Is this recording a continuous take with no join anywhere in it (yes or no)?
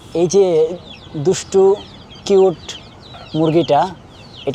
yes